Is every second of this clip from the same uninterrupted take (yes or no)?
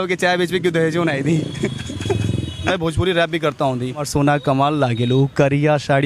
no